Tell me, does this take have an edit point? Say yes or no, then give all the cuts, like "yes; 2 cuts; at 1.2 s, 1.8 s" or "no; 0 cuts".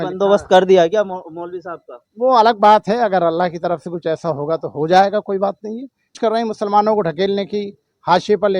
yes; 1 cut; at 6.2 s